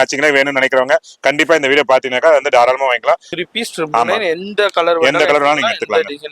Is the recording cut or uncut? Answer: cut